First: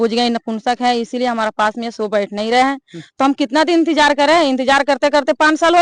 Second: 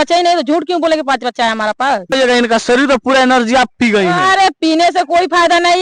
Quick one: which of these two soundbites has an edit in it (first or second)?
second